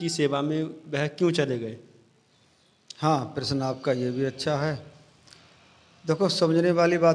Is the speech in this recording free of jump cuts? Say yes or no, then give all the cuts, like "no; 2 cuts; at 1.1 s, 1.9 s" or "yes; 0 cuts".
yes; 0 cuts